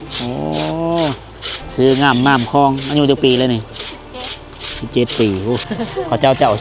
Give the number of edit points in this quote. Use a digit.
1